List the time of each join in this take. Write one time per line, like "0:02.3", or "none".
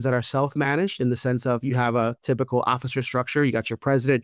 none